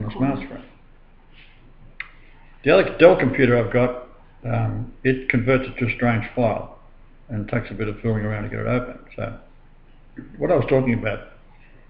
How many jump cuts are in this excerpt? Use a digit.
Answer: 1